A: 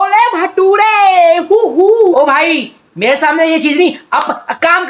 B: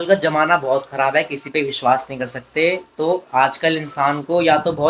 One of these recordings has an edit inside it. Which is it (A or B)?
A